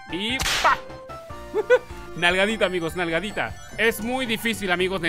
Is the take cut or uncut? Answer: cut